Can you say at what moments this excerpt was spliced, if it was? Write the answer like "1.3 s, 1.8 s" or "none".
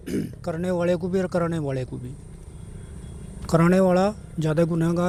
none